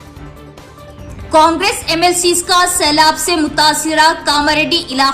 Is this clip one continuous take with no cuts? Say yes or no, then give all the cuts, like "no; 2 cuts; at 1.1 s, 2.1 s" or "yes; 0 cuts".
yes; 0 cuts